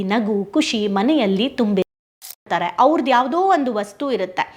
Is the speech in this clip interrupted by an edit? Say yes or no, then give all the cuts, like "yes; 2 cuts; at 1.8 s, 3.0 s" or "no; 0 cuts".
yes; 1 cut; at 2.0 s